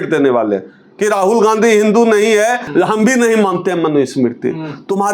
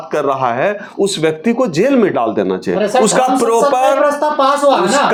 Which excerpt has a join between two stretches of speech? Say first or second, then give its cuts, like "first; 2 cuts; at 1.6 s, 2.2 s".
first; 1 cut; at 2.6 s